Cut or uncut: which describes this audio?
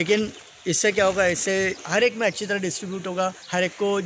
uncut